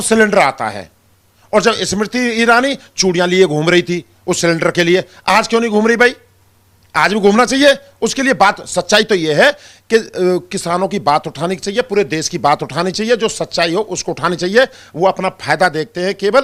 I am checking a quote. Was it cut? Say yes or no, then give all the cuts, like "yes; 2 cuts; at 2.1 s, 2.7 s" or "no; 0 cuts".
no; 0 cuts